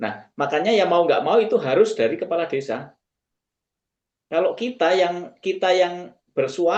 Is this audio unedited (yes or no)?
yes